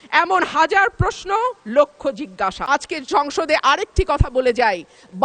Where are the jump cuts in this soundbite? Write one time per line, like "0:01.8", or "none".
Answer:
0:02.6